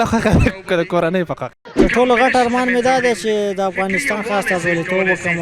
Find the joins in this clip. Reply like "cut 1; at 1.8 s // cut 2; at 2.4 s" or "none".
cut 1; at 1.5 s